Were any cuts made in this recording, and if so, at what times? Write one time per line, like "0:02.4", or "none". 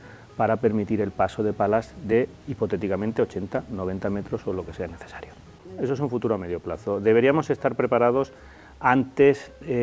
none

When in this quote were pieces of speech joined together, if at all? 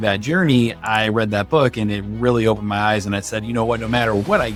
none

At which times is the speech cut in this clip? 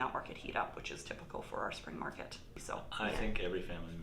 0:02.5

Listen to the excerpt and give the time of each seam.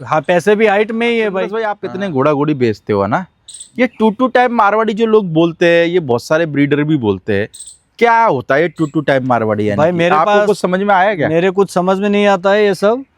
0:01.8

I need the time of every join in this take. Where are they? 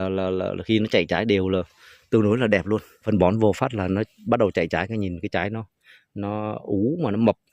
0:03.0

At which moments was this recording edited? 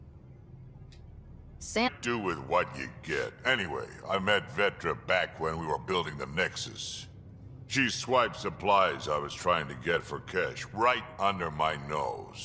none

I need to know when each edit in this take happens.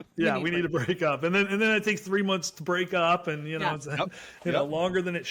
none

